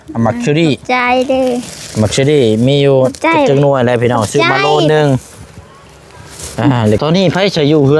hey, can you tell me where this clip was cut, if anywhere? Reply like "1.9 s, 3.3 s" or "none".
7.0 s